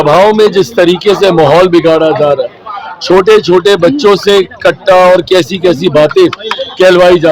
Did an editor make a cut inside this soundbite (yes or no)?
no